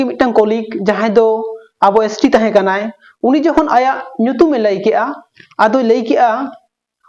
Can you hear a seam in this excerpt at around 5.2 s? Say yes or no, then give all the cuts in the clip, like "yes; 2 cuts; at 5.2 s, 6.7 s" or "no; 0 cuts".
no; 0 cuts